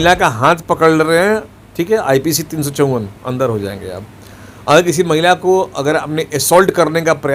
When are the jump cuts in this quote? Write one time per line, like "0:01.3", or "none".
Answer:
none